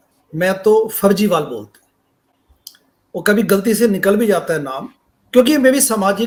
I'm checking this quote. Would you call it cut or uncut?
uncut